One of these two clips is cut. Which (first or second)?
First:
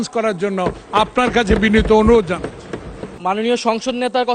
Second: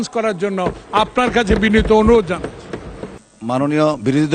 first